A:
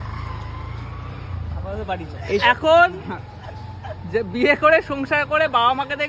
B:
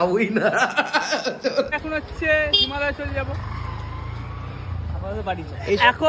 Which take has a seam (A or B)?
B